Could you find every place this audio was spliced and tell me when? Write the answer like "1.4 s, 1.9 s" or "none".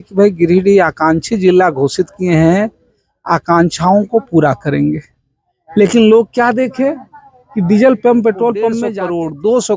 8.8 s